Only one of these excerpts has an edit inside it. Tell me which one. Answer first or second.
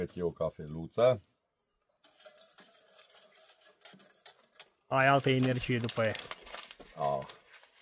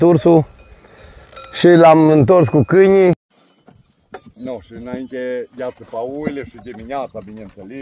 second